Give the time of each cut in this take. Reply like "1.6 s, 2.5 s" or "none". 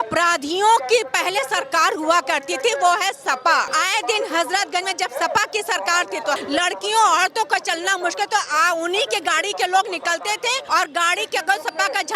3.7 s, 6.4 s, 10.6 s